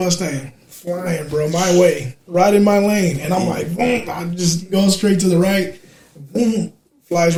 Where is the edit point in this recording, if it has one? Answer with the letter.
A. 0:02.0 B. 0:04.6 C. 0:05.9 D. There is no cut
D